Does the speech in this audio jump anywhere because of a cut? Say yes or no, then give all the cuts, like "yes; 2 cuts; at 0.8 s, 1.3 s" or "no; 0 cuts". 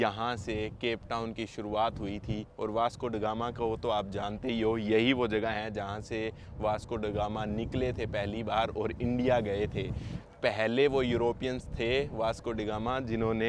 no; 0 cuts